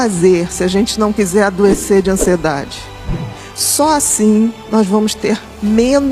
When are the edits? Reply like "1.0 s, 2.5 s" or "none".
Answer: 3.2 s